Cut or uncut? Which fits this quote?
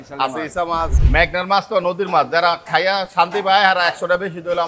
cut